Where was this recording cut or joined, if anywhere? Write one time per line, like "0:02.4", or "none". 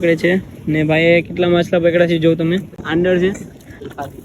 0:02.8